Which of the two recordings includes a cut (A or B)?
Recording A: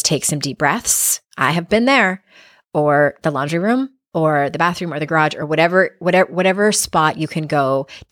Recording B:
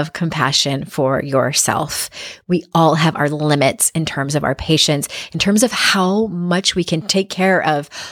B